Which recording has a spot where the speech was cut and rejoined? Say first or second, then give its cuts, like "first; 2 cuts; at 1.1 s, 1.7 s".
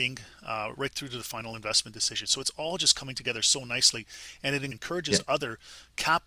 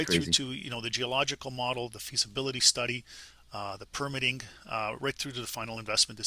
first; 1 cut; at 4.8 s